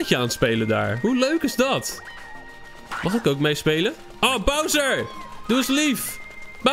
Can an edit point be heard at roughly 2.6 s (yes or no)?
no